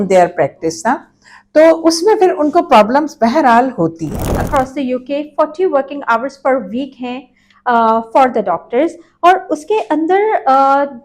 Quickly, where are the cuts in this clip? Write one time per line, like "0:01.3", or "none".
0:04.5

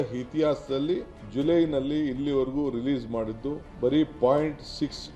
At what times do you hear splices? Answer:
0:01.2
0:03.7

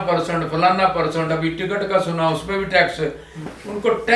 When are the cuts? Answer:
none

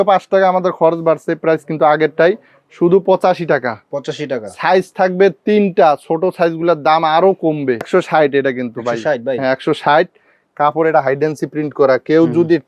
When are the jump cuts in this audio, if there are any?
0:07.8

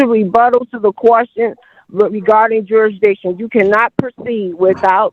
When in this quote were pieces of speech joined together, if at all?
none

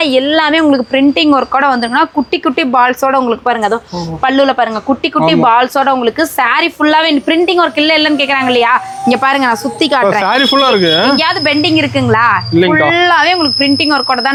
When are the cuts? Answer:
none

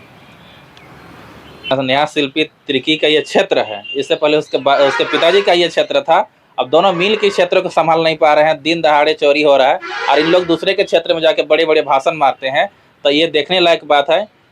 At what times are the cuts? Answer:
0:01.7

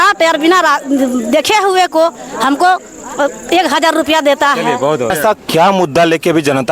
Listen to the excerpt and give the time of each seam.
0:05.1

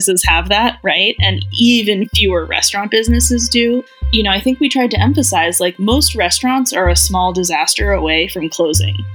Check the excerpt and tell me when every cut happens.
none

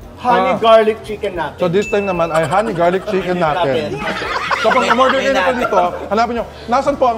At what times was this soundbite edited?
none

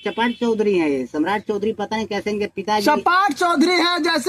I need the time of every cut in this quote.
none

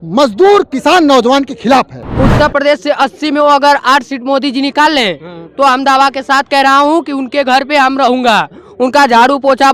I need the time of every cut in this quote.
0:02.1

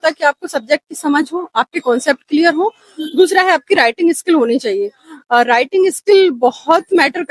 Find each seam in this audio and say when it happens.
none

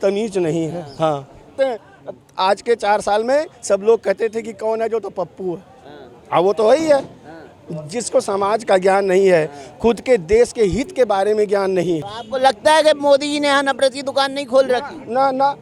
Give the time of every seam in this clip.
0:01.6
0:12.2

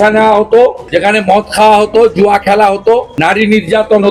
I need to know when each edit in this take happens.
0:00.9
0:03.1

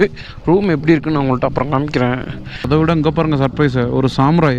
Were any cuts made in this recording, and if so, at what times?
0:02.7

